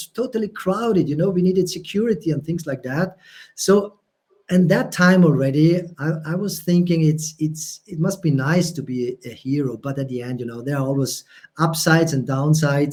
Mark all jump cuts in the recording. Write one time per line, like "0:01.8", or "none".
none